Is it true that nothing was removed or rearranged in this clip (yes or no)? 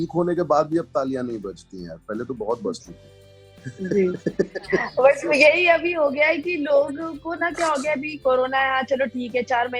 yes